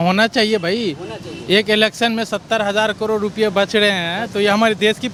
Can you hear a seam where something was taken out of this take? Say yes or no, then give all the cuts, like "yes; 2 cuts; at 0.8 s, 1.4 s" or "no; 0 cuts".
no; 0 cuts